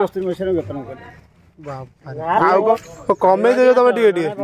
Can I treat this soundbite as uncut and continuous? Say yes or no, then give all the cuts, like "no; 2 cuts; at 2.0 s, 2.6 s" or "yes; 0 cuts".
no; 1 cut; at 2.8 s